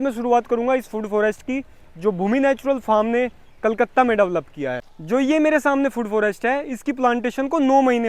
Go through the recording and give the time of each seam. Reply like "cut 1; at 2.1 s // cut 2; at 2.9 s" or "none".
cut 1; at 4.8 s